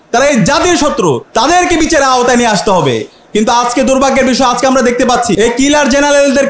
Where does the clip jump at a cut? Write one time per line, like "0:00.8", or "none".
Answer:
0:01.2
0:05.4